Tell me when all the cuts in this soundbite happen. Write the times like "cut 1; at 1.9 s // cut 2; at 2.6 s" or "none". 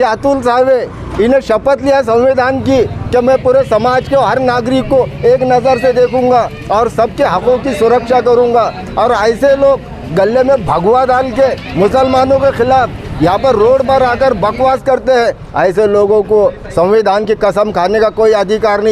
none